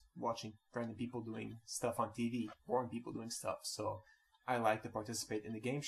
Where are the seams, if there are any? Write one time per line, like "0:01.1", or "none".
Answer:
none